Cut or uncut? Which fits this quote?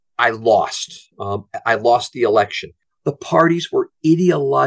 cut